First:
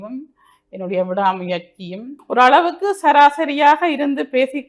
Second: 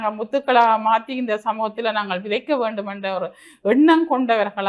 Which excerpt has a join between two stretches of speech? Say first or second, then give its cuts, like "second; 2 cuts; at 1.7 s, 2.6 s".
first; 1 cut; at 2.2 s